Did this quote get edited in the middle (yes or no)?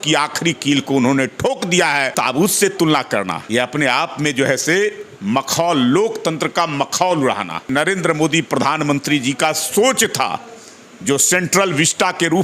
yes